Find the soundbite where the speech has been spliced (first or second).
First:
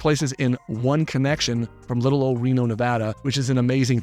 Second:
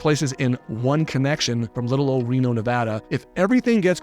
second